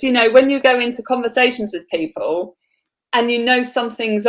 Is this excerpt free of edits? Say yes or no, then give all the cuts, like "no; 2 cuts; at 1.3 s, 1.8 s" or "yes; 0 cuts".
yes; 0 cuts